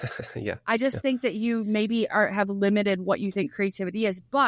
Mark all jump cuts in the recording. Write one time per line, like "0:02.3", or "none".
none